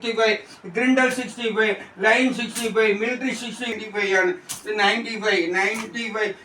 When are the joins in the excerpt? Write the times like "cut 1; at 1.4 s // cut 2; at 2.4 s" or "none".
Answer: cut 1; at 3.7 s

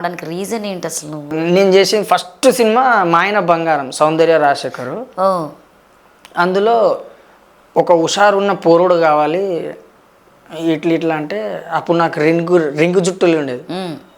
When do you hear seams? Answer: cut 1; at 1.3 s

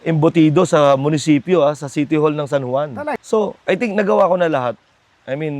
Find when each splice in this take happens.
cut 1; at 3.1 s

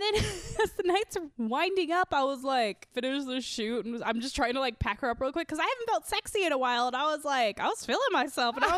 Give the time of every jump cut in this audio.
cut 1; at 1.2 s // cut 2; at 2.9 s

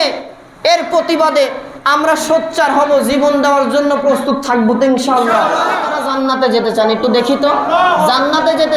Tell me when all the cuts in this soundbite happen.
cut 1; at 5.9 s

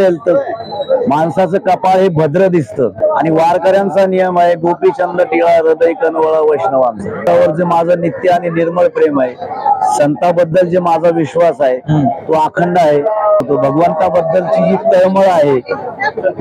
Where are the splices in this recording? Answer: cut 1; at 2.9 s // cut 2; at 7.2 s // cut 3; at 13.4 s

